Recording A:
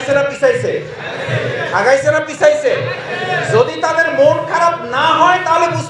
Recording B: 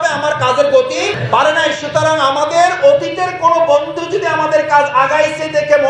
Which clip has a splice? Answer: B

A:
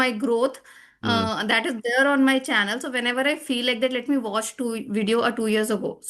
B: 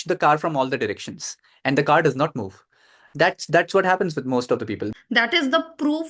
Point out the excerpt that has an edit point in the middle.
B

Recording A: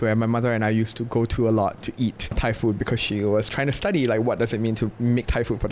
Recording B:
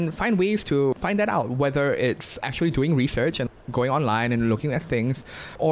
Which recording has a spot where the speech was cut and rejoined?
B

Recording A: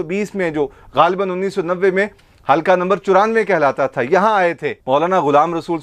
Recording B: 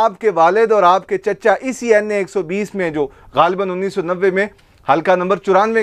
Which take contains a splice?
A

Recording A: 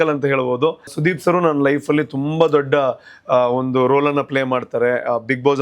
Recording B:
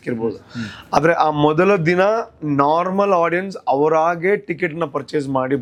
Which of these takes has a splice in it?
A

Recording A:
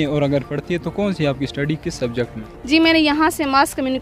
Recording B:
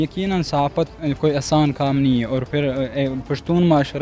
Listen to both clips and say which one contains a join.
A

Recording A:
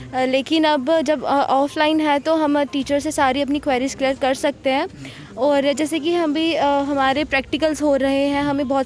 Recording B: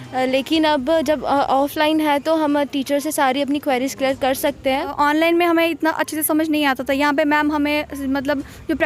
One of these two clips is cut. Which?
B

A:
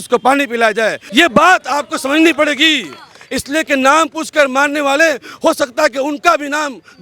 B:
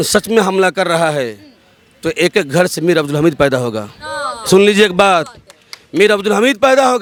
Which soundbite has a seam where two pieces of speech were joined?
A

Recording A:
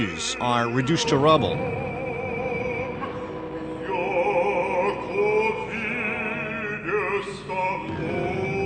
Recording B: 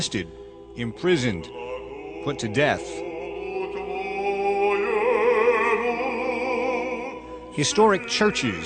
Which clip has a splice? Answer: A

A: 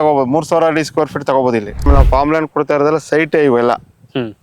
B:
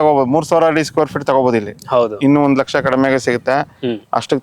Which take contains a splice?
A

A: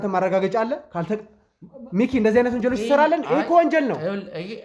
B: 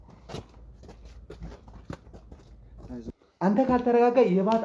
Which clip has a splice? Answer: B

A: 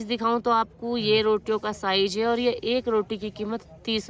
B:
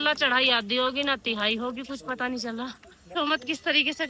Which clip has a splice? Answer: B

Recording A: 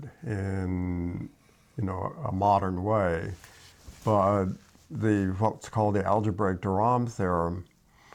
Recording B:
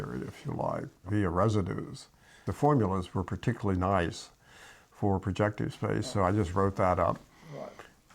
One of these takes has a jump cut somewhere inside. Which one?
B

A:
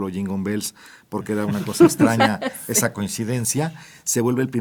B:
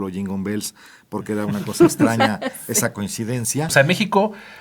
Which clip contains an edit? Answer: B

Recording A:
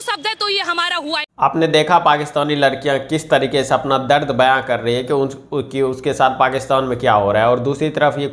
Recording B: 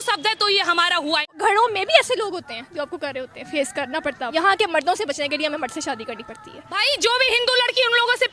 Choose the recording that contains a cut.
B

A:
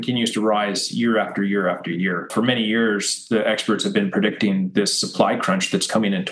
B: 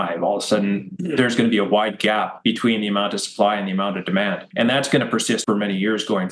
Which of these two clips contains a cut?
B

